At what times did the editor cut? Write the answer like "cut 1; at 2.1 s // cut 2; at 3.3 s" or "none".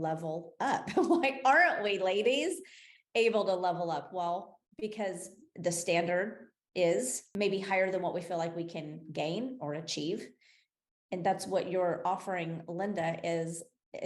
cut 1; at 4.6 s // cut 2; at 7.2 s